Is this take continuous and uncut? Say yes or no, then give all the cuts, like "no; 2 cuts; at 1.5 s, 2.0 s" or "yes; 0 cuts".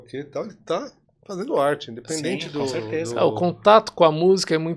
yes; 0 cuts